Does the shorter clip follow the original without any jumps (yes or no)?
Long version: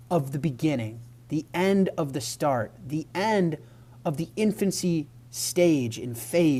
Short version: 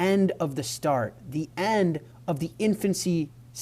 no